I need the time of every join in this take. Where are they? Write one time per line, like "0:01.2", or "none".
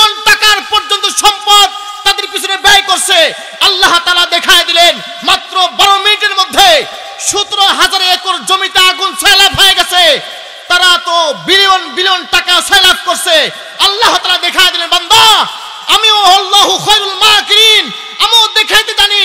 none